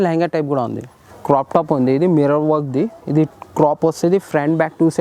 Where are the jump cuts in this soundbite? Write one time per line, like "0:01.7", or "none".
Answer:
0:01.1